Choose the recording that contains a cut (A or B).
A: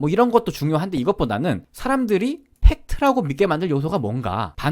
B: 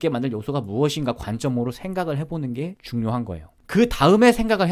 B